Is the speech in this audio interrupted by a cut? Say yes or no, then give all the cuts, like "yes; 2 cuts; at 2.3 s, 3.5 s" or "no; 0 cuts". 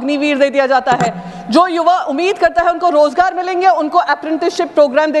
no; 0 cuts